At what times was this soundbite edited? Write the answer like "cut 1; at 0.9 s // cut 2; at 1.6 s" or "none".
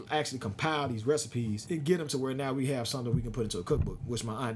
cut 1; at 1.6 s